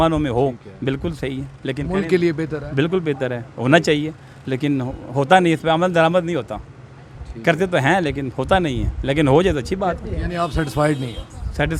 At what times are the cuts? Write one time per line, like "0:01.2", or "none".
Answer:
none